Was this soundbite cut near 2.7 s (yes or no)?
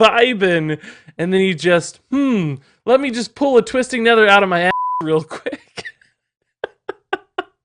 no